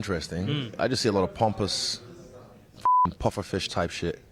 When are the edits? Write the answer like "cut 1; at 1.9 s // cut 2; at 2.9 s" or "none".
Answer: none